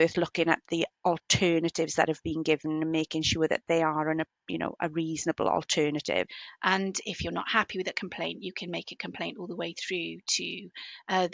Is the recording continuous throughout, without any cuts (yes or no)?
no